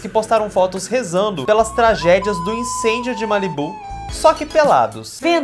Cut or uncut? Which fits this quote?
uncut